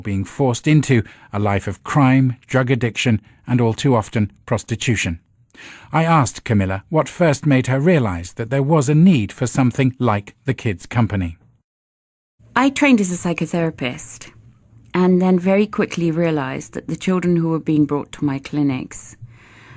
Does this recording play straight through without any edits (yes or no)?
no